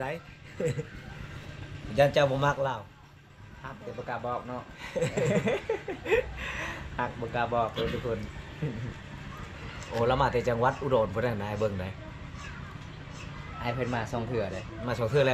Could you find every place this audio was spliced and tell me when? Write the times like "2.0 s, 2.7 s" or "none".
none